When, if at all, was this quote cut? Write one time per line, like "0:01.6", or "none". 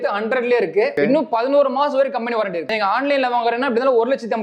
0:00.9
0:02.6